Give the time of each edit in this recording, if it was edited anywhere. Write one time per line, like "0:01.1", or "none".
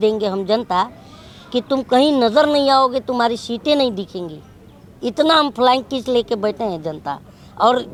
none